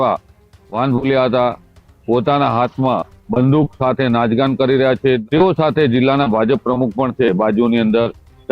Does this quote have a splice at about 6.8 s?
no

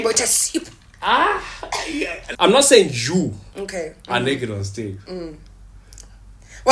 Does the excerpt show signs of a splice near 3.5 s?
no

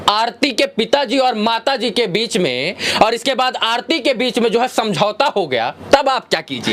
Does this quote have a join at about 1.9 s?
no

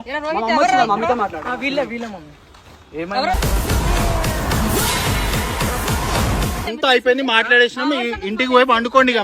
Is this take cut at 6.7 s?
yes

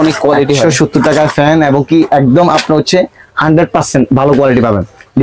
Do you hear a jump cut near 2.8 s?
no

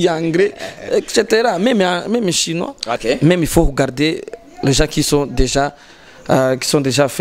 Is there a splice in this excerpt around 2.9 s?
yes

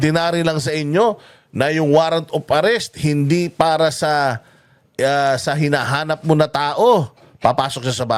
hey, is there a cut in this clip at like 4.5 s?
no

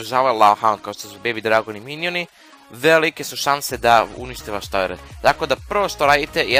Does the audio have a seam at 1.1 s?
no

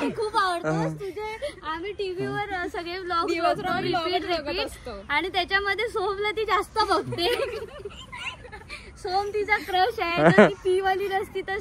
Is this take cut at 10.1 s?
yes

